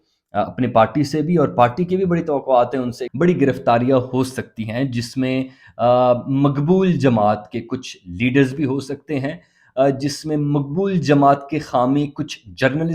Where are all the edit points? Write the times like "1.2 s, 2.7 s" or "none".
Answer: 3.0 s